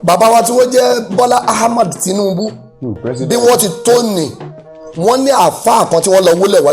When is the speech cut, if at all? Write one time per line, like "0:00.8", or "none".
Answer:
none